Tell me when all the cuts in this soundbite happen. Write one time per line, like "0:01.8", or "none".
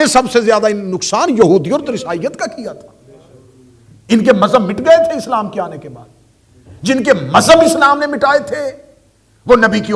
none